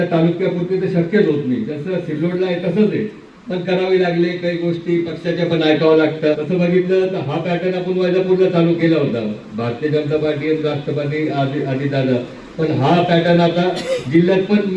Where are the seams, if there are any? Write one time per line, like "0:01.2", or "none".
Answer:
0:06.4